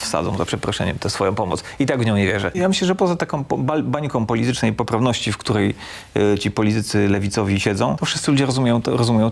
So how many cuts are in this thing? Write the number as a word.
one